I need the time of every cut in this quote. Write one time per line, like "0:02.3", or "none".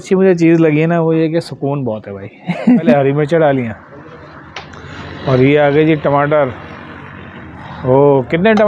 0:02.9